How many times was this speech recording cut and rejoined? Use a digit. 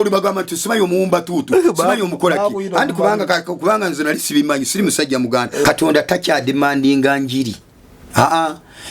1